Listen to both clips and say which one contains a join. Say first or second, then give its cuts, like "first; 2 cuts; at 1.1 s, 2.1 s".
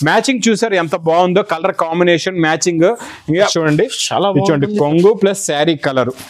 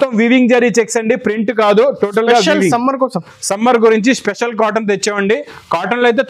first; 1 cut; at 3.5 s